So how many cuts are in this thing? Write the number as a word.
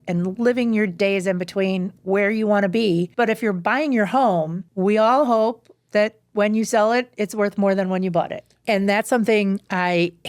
three